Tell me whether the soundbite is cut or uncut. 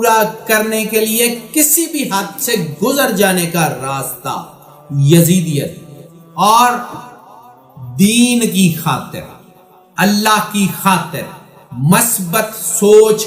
uncut